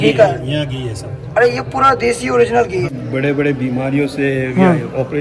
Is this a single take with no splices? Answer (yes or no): no